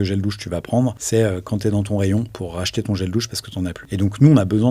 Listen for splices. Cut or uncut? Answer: cut